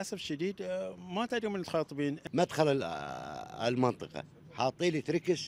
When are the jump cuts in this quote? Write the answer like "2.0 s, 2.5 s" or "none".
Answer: 2.2 s